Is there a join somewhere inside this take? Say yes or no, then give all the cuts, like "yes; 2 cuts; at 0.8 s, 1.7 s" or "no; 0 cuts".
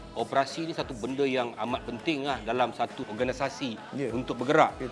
no; 0 cuts